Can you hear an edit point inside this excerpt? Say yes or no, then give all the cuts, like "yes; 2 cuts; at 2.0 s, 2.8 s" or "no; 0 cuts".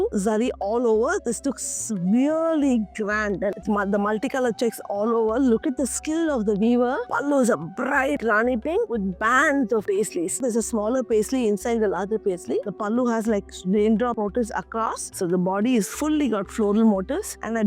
yes; 5 cuts; at 3.5 s, 7.1 s, 10.4 s, 12.7 s, 15.0 s